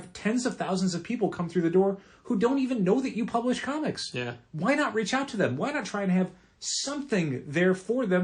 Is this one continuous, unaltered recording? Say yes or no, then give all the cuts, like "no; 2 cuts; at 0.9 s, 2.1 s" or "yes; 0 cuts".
yes; 0 cuts